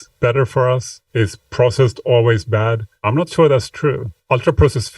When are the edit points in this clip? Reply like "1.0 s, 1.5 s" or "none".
1.0 s, 2.9 s, 4.1 s